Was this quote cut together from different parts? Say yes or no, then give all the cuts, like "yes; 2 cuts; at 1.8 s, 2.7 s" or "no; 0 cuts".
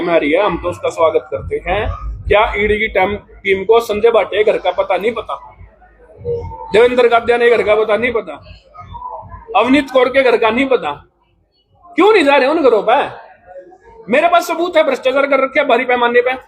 no; 0 cuts